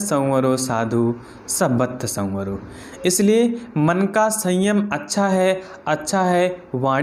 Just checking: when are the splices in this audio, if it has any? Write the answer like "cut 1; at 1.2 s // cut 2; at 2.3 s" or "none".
none